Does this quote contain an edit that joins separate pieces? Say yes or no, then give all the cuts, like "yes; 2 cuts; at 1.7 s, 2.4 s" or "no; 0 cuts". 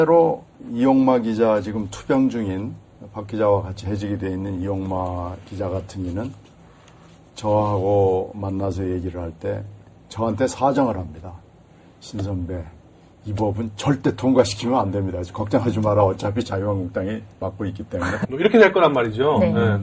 no; 0 cuts